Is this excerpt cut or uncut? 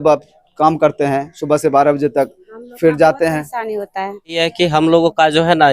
cut